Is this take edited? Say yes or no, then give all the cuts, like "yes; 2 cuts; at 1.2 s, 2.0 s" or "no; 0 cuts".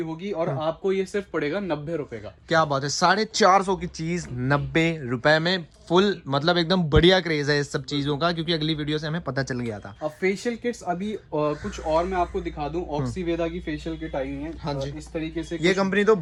no; 0 cuts